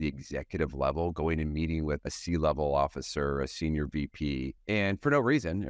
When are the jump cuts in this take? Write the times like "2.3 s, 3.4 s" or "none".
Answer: 2.0 s, 4.6 s